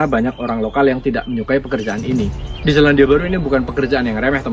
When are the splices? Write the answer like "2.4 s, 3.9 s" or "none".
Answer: 2.4 s